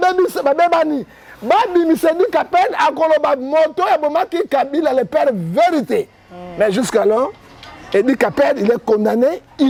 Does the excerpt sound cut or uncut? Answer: uncut